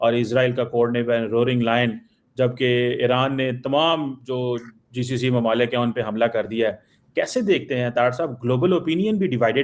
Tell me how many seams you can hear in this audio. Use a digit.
0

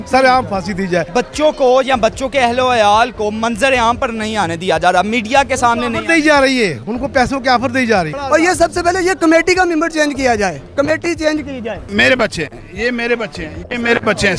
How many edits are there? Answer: 3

